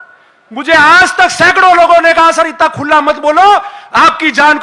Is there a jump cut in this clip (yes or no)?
no